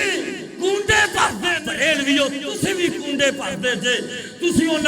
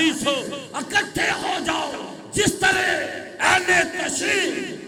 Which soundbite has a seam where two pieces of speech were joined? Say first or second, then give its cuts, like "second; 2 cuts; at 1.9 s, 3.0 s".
first; 1 cut; at 1.6 s